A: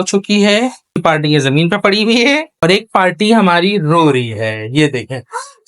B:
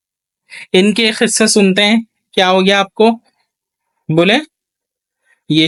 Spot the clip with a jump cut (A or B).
A